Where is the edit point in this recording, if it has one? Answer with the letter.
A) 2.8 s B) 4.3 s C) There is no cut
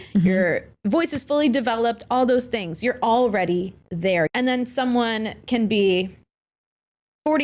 B